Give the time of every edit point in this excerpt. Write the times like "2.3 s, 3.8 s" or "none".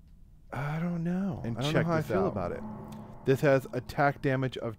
2.6 s